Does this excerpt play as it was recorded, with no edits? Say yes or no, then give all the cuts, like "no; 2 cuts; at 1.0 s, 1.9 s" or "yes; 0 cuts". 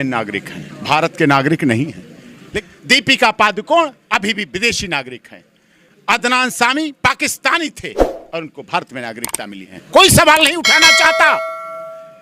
yes; 0 cuts